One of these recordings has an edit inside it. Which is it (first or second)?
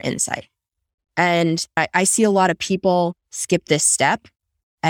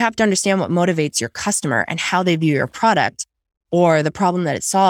first